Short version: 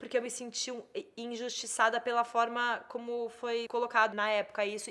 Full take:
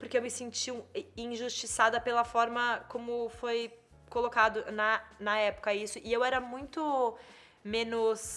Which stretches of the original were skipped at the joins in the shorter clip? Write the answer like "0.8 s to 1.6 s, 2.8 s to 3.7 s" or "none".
4.0 s to 5.1 s

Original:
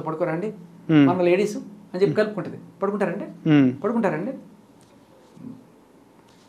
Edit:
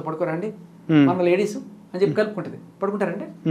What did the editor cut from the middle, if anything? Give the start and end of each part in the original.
none

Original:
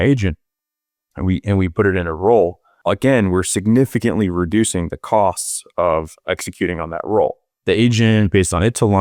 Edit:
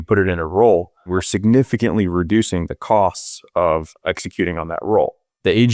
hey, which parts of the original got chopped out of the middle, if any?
2.8 s to 3.3 s

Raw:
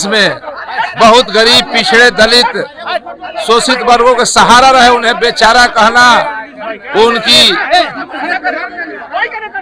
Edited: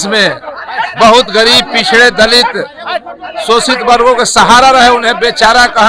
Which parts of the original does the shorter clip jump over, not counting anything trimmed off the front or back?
none

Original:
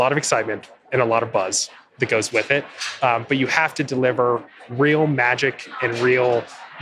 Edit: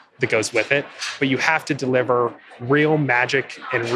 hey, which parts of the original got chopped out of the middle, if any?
2.9 s to 3.2 s

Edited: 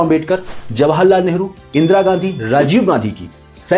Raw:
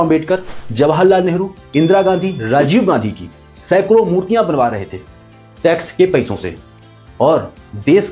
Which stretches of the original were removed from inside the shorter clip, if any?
none

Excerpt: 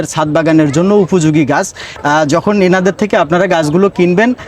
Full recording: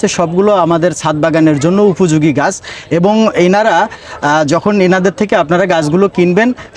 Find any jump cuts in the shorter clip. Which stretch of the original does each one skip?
2.7 s to 4.0 s

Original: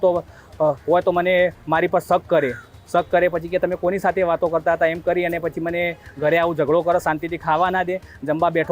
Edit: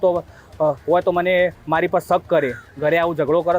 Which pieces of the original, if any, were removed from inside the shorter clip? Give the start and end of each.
2.7 s to 6.1 s

